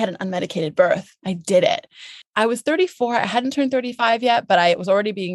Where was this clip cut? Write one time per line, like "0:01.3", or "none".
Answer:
0:02.2